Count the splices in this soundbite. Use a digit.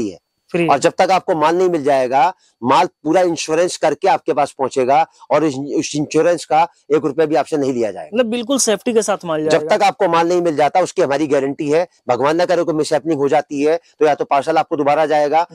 0